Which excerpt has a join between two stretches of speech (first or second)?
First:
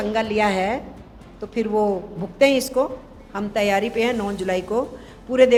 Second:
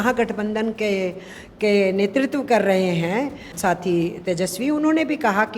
second